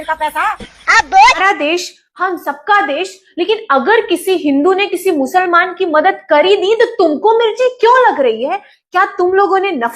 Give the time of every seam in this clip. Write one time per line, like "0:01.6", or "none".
0:01.4